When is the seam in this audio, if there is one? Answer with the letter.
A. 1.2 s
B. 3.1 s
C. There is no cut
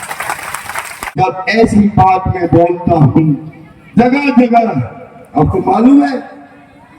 A